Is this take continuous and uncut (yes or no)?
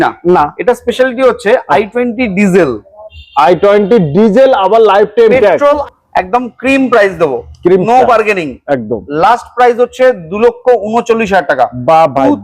no